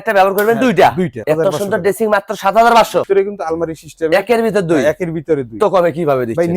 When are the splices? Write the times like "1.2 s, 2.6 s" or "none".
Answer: 1.2 s, 3.0 s, 5.6 s